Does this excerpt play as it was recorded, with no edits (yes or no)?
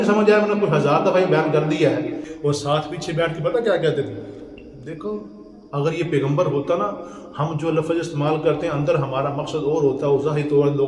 no